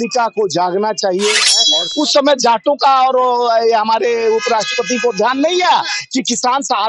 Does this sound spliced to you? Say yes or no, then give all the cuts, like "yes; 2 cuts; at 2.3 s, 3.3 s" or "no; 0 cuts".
yes; 1 cut; at 1.8 s